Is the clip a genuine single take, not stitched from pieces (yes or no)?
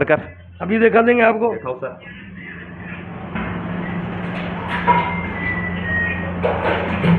yes